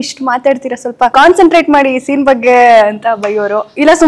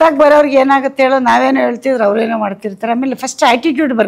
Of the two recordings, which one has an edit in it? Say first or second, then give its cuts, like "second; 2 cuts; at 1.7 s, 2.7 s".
first; 1 cut; at 1.1 s